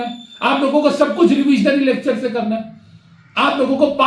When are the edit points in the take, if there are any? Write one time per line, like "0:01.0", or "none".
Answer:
none